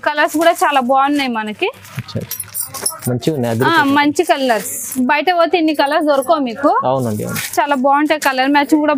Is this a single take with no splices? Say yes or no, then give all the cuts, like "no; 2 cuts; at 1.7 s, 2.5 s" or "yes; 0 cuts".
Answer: yes; 0 cuts